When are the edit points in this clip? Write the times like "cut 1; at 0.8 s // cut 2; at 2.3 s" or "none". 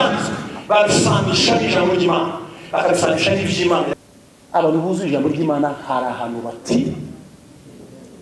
cut 1; at 3.9 s